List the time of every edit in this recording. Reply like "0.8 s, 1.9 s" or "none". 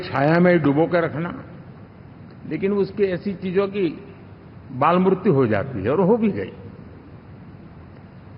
none